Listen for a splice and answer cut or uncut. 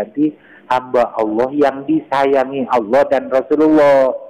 uncut